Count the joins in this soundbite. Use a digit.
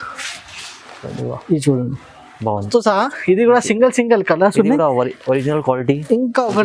1